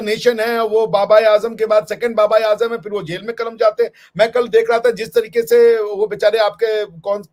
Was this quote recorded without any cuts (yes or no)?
yes